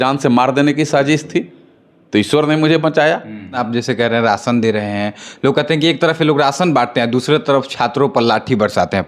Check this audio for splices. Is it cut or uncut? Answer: cut